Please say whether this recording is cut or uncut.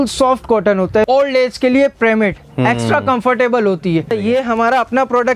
cut